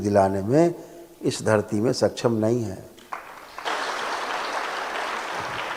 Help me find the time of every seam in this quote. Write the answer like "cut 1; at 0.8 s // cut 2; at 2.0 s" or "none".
none

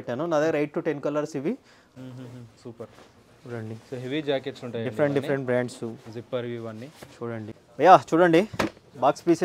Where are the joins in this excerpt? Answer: cut 1; at 1.8 s // cut 2; at 7.6 s

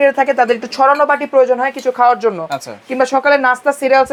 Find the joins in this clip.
none

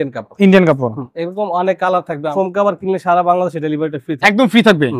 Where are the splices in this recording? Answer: cut 1; at 2.3 s

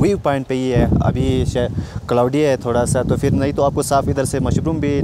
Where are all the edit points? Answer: none

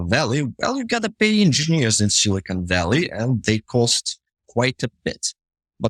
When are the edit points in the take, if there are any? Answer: none

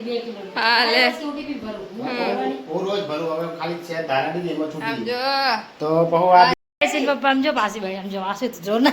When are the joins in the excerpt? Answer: cut 1; at 6.5 s

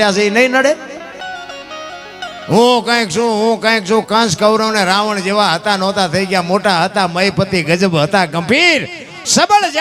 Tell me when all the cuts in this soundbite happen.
cut 1; at 1.2 s

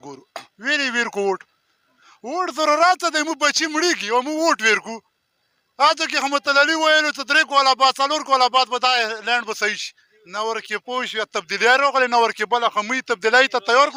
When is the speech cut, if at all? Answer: none

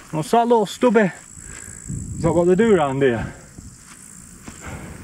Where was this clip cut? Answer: none

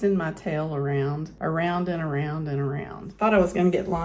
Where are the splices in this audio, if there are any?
cut 1; at 3.1 s

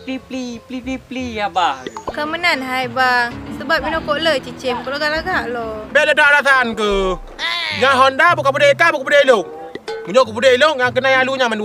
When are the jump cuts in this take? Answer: cut 1; at 2.0 s

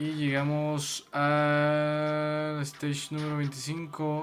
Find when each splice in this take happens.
none

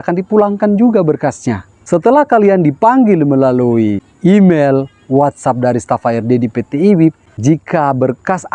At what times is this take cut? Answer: cut 1; at 1.7 s // cut 2; at 4.1 s // cut 3; at 7.3 s

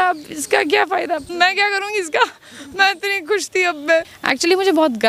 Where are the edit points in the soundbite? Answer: cut 1; at 1.3 s // cut 2; at 4.2 s

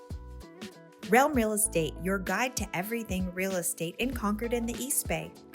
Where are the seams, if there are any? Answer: cut 1; at 1.0 s

